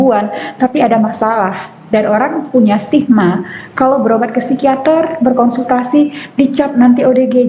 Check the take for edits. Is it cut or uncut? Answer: uncut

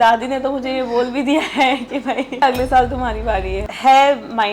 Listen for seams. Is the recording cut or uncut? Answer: cut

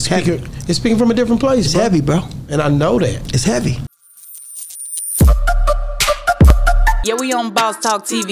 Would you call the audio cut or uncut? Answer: cut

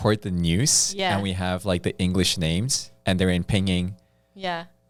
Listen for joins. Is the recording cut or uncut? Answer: uncut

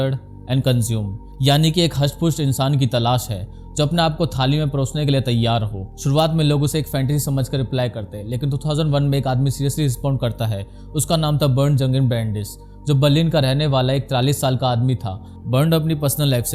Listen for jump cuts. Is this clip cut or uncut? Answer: uncut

